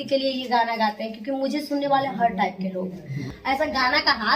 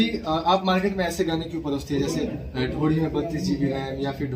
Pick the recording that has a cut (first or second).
first